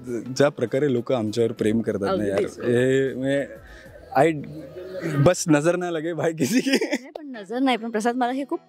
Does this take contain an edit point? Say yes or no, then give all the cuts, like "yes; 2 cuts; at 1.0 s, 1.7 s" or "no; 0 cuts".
no; 0 cuts